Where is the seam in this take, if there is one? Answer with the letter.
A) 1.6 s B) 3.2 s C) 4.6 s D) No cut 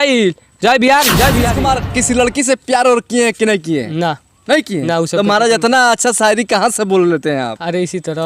A